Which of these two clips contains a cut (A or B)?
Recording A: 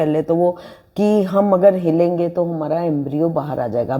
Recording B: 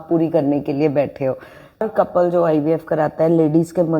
B